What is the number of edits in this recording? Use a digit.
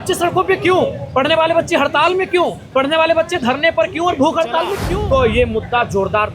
1